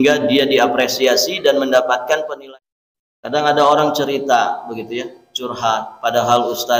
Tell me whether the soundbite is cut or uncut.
cut